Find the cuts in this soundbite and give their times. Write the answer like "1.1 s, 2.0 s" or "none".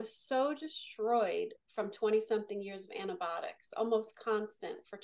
none